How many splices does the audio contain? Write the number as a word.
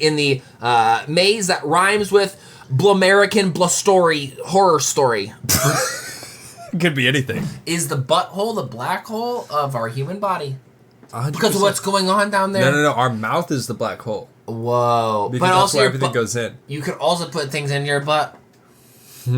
one